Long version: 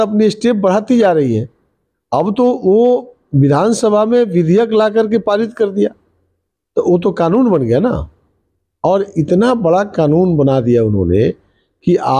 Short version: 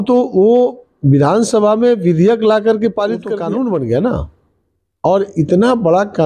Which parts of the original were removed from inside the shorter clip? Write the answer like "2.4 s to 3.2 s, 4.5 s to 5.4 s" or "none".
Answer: 5.6 s to 7.1 s